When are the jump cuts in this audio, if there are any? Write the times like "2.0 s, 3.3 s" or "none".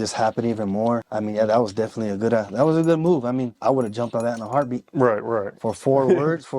1.1 s, 3.5 s